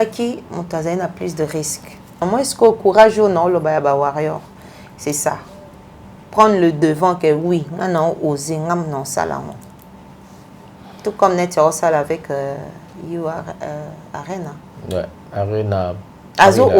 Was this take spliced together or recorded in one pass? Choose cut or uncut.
cut